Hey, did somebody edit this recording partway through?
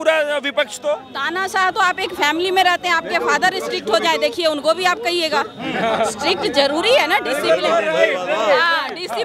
no; 0 cuts

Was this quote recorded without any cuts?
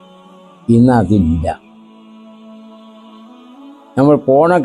no; 3 cuts; at 0.7 s, 2.2 s, 3.9 s

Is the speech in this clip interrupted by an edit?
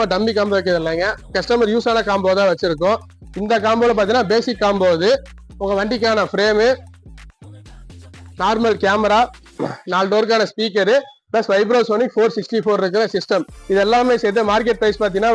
no; 0 cuts

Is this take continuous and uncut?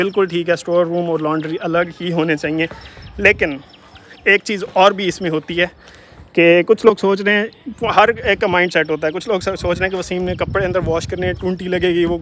yes; 0 cuts

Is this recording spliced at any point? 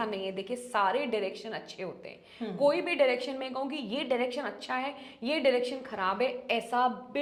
no; 0 cuts

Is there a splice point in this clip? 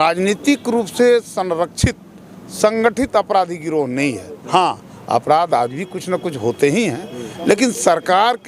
no; 0 cuts

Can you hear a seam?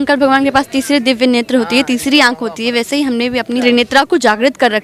yes; 1 cut; at 3.6 s

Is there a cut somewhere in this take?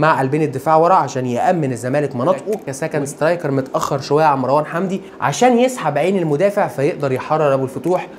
yes; 1 cut; at 2.6 s

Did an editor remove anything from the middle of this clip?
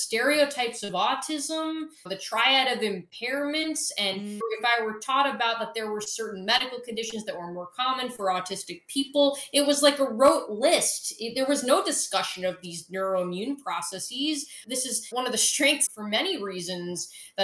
yes; 3 cuts; at 1.9 s, 4.4 s, 14.6 s

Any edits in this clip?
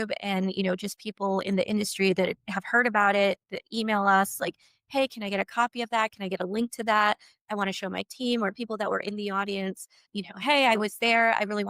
yes; 1 cut; at 10.0 s

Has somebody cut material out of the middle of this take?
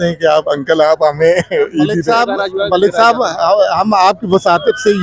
yes; 1 cut; at 2.0 s

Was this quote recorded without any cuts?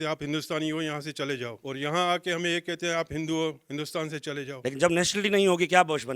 no; 2 cuts; at 1.6 s, 4.6 s

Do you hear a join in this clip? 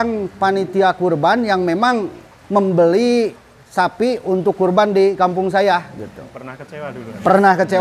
no; 0 cuts

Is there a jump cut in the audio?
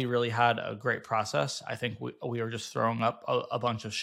no; 0 cuts

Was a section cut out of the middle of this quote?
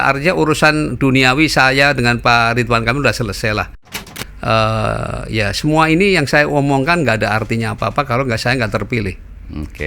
yes; 1 cut; at 3.9 s

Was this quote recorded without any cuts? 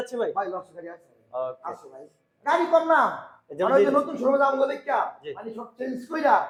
yes; 0 cuts

